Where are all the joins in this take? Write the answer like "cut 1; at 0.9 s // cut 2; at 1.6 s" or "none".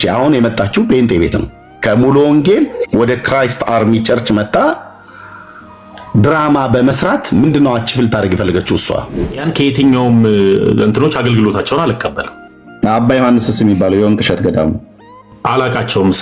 cut 1; at 9.3 s